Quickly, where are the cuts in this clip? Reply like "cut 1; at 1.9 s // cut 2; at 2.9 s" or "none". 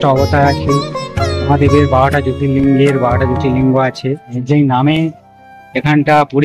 cut 1; at 4.3 s